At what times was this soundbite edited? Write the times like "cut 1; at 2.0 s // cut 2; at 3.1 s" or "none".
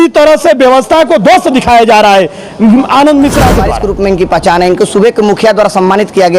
cut 1; at 3.8 s